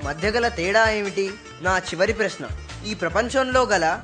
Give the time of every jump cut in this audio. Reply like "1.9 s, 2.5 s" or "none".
1.5 s